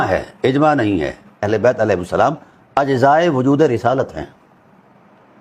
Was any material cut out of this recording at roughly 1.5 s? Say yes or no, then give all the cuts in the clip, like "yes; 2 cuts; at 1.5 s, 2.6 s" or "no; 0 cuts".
yes; 1 cut; at 1.5 s